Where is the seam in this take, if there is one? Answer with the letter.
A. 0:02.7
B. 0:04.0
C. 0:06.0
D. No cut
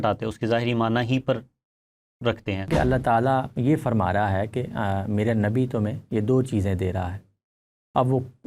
A